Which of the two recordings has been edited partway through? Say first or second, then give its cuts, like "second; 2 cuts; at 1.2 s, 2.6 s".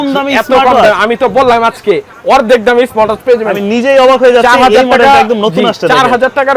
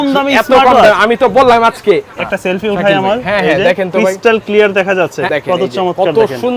second; 2 cuts; at 2.1 s, 5.3 s